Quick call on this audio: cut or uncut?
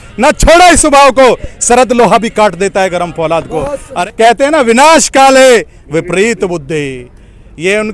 cut